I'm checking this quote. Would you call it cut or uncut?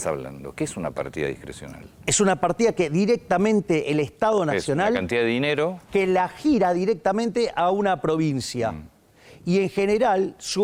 uncut